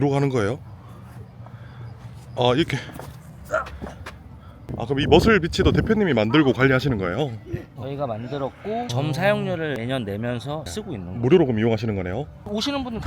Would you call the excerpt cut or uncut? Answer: cut